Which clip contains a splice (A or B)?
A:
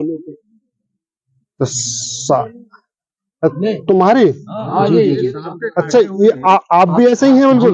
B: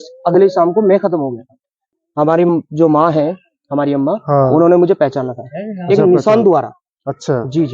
B